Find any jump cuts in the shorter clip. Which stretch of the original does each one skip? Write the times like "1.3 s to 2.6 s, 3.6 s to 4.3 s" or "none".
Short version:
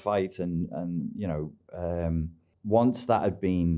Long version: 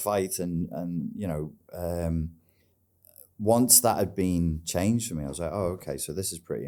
2.4 s to 3.2 s